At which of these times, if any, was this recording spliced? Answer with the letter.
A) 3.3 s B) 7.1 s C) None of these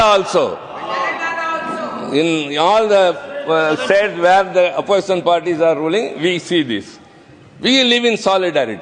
C